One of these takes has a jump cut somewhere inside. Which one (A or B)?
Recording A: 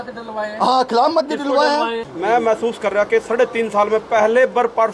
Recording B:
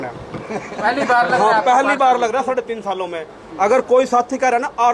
A